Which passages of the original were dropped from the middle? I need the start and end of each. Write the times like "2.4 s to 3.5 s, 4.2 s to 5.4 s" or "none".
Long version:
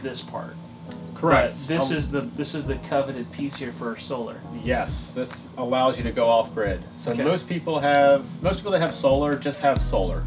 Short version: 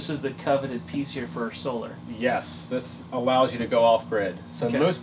none